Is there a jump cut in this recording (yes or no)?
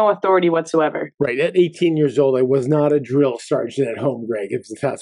no